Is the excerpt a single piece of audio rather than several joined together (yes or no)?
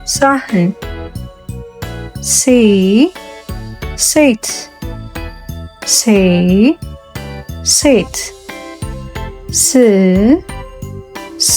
no